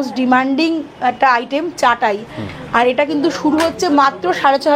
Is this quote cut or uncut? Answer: uncut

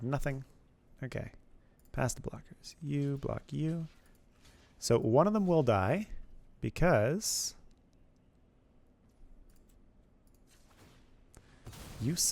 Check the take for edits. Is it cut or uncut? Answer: cut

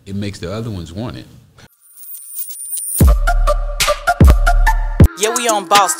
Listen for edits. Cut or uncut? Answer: cut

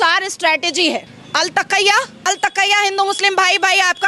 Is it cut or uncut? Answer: cut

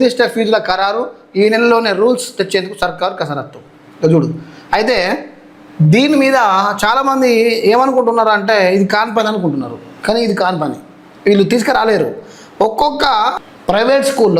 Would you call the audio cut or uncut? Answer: cut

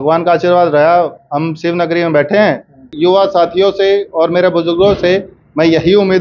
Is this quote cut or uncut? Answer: cut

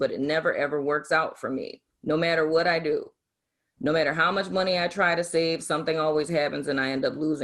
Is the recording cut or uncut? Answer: uncut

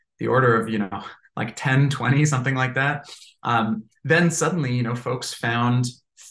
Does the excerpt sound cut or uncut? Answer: uncut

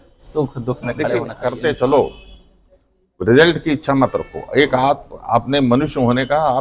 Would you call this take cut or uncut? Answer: cut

